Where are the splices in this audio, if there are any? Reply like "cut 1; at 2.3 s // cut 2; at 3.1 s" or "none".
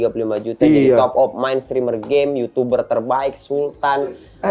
none